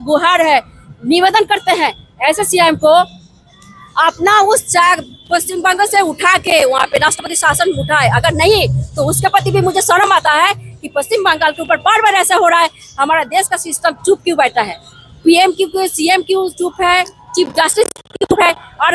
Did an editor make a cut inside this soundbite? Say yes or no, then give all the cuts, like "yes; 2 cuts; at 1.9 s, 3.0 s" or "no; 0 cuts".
no; 0 cuts